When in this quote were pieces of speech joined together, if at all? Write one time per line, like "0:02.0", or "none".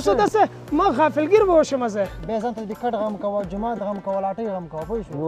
0:02.2